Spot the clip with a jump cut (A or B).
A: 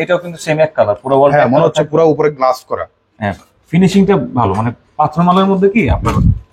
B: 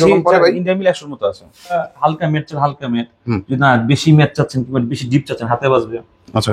B